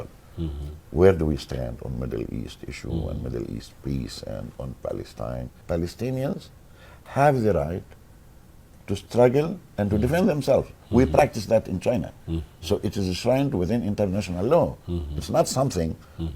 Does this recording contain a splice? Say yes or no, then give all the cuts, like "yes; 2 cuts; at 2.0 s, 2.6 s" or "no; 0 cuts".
yes; 1 cut; at 5.5 s